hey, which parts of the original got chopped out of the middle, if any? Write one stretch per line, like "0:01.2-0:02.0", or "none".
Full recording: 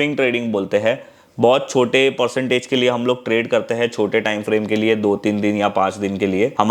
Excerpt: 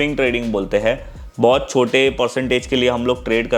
none